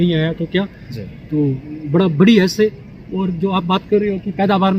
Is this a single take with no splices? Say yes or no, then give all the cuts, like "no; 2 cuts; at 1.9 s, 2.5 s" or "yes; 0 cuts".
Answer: yes; 0 cuts